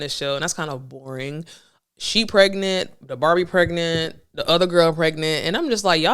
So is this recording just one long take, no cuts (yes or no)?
yes